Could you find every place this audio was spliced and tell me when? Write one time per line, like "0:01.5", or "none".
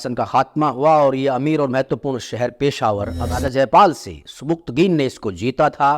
0:03.2